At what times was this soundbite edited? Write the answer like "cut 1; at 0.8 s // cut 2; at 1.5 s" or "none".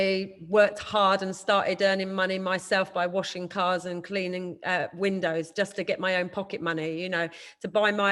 none